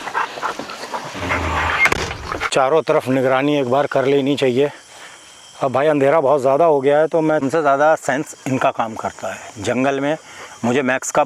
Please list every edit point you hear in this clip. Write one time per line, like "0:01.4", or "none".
0:02.5
0:07.5

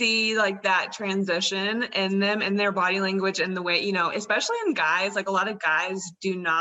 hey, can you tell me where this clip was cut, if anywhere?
none

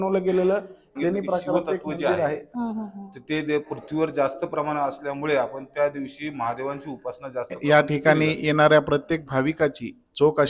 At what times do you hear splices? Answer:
0:02.5
0:07.6

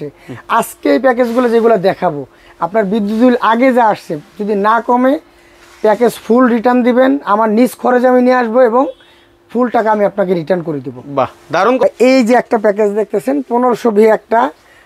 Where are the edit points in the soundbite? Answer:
none

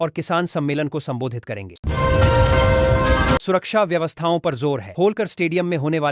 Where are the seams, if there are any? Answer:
0:01.8
0:03.4

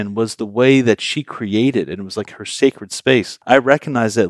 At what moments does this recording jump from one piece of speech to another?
0:03.3

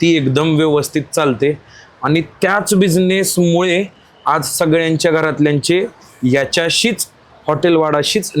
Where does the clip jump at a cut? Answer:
none

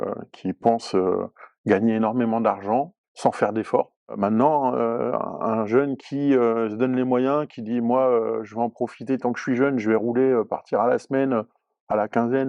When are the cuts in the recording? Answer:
0:03.0
0:04.1

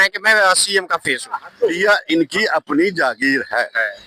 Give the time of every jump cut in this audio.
0:01.7

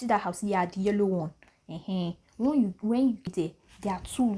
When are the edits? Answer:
0:03.3

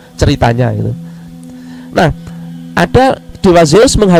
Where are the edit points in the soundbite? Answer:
none

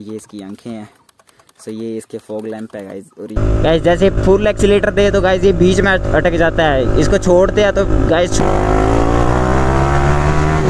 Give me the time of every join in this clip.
0:03.4
0:08.4

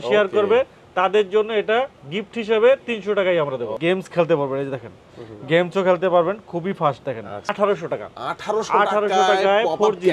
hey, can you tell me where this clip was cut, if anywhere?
0:03.8
0:07.5

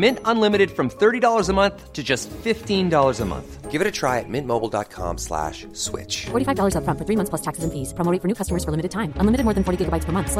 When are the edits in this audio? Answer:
none

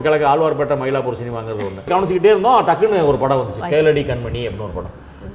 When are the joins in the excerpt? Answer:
0:01.9

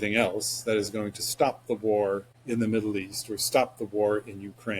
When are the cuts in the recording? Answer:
0:02.3

